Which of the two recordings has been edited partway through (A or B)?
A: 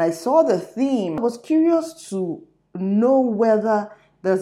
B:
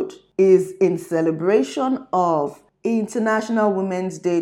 A